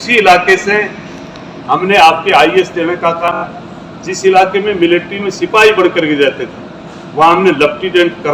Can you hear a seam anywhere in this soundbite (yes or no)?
yes